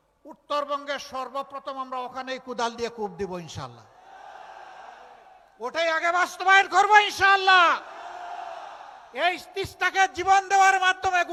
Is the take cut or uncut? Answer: uncut